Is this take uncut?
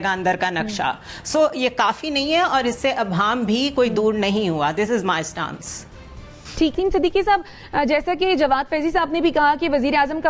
yes; 0 cuts

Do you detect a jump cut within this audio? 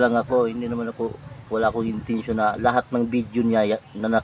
no; 0 cuts

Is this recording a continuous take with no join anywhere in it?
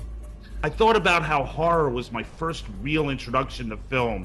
yes; 0 cuts

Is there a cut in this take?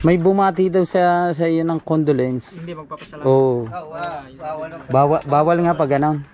no; 0 cuts

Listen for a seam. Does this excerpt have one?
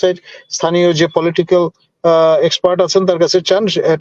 no; 0 cuts

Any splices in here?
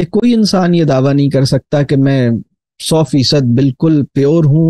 no; 0 cuts

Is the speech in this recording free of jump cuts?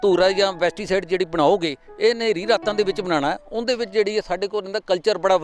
yes; 0 cuts

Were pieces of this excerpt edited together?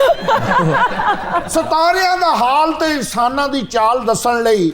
yes; 1 cut; at 1.5 s

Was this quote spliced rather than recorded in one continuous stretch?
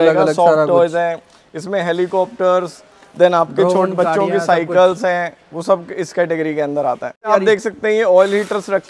yes; 1 cut; at 7.3 s

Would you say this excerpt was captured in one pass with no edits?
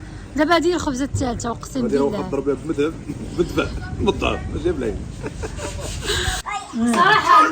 no; 1 cut; at 6.4 s

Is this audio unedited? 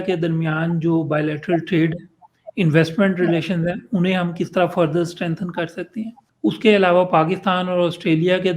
no; 1 cut; at 6.2 s

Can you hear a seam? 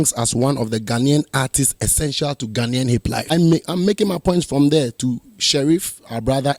yes; 1 cut; at 3.3 s

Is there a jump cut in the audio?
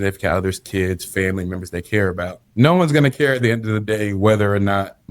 yes; 1 cut; at 2.4 s

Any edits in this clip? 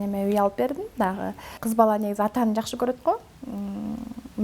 yes; 1 cut; at 1.6 s

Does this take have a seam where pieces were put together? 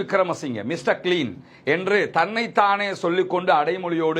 no; 0 cuts

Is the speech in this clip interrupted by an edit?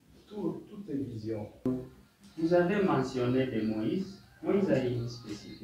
yes; 1 cut; at 1.4 s

